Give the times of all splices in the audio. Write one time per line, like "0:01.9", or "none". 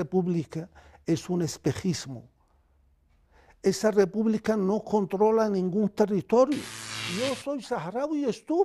0:07.0